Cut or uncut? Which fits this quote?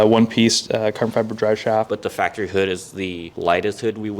cut